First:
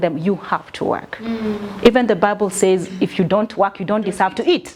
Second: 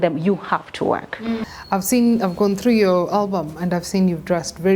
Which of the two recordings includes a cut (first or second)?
second